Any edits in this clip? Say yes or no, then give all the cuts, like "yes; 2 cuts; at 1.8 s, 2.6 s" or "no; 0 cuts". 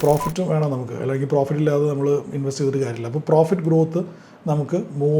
no; 0 cuts